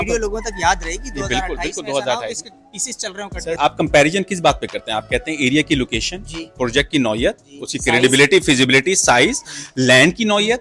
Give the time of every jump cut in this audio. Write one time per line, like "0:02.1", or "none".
0:03.6